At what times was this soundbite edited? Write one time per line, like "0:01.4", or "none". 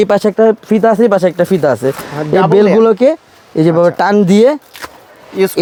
none